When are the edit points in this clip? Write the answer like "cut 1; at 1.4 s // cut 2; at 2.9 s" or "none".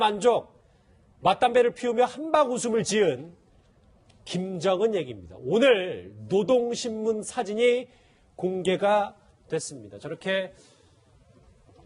none